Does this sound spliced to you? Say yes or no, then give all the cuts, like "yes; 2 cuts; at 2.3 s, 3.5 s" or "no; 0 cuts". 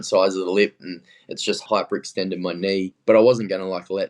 yes; 2 cuts; at 1.6 s, 3.0 s